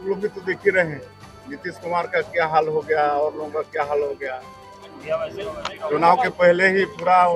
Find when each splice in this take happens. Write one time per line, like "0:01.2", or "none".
none